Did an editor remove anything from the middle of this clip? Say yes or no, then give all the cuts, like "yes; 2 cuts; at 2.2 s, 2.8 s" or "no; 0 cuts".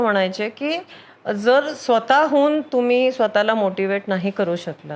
no; 0 cuts